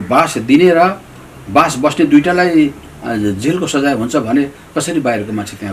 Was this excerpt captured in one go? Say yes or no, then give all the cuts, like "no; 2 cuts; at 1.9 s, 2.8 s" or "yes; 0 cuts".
yes; 0 cuts